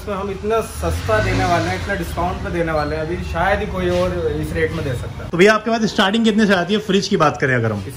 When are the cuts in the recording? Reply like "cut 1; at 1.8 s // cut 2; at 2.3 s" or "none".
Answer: cut 1; at 5.2 s